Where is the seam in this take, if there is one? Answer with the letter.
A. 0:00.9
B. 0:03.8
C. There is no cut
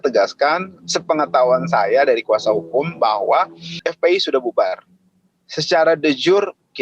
B